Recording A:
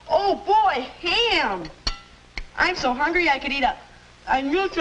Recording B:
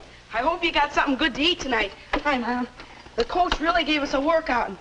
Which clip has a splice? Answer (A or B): B